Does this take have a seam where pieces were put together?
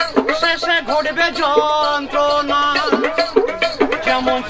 no; 0 cuts

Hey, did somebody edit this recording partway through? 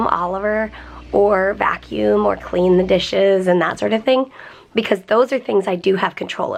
no; 0 cuts

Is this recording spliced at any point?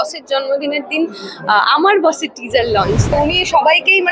yes; 1 cut; at 3.1 s

